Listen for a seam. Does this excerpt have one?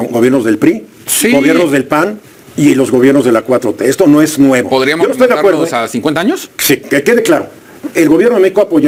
no; 0 cuts

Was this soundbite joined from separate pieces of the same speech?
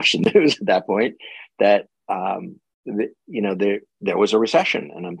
no; 0 cuts

